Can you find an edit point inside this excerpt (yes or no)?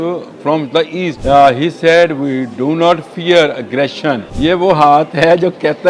yes